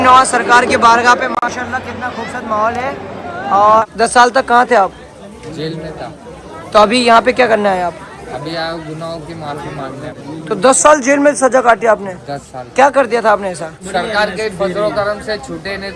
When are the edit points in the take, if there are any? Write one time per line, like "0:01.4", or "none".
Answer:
0:03.8
0:10.2
0:13.8